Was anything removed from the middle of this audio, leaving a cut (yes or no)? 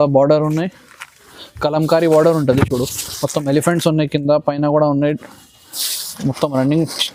no